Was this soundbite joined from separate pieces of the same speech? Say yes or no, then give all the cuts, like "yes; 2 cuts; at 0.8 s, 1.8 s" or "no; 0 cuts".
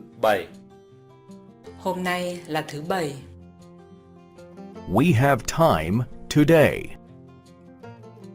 no; 0 cuts